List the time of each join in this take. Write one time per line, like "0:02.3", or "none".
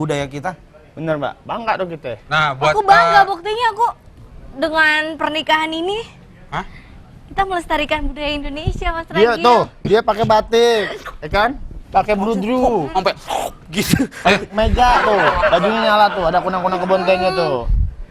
none